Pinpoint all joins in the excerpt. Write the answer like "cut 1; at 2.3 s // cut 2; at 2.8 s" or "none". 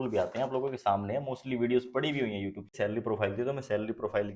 cut 1; at 2.7 s